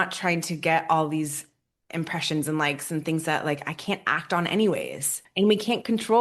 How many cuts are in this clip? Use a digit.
1